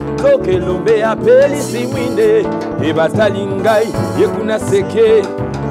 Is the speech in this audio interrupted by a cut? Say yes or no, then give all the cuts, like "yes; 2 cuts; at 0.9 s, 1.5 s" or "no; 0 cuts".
no; 0 cuts